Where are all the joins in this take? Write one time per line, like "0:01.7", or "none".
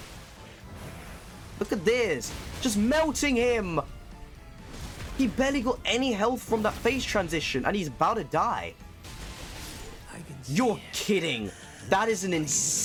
none